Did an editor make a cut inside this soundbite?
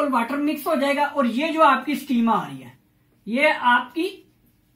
no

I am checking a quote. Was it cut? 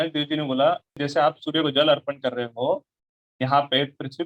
yes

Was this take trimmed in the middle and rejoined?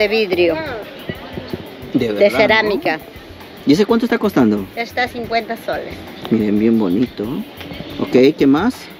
no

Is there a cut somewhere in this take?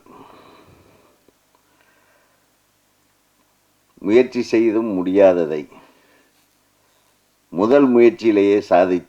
no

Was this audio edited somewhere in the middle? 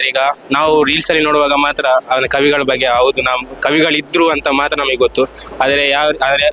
no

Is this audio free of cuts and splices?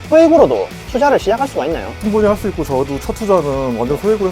no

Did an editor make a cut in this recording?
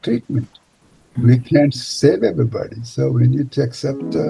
yes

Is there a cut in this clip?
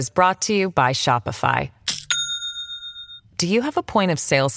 no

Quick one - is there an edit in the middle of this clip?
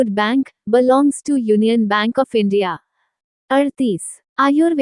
no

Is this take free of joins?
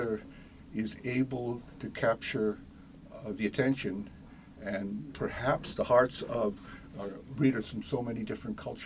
yes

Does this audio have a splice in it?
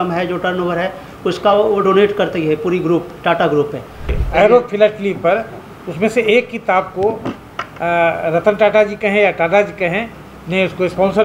yes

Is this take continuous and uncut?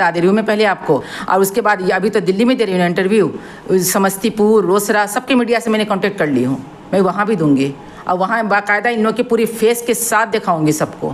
yes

